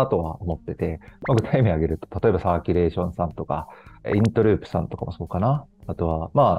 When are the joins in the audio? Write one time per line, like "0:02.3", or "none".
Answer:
none